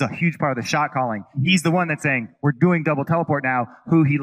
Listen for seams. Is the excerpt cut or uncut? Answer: cut